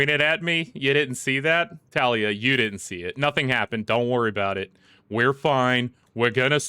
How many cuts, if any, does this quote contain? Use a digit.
1